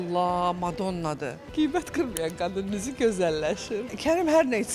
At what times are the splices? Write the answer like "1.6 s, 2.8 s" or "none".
1.2 s